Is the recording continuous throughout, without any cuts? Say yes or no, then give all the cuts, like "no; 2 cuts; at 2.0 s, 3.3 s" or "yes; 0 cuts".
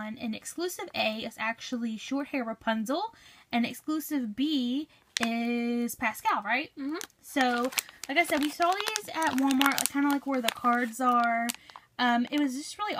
no; 1 cut; at 4.2 s